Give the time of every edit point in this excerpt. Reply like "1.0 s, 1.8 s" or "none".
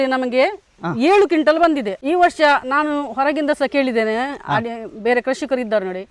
1.9 s